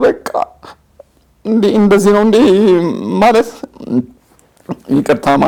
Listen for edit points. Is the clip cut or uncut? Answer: uncut